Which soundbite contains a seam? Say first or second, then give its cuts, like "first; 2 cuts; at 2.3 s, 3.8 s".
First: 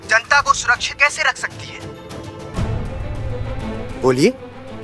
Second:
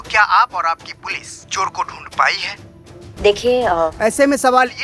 first; 1 cut; at 3.9 s